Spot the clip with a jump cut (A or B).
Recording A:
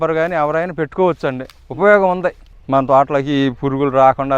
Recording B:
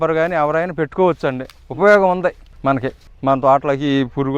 A